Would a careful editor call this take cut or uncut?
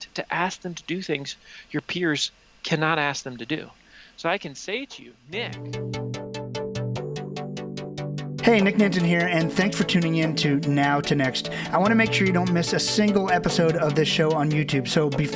cut